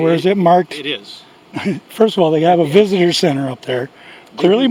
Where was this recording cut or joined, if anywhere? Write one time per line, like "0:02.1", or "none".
none